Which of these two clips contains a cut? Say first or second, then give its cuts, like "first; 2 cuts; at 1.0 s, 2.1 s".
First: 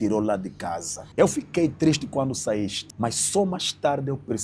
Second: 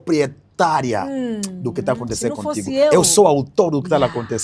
first; 2 cuts; at 1.0 s, 2.8 s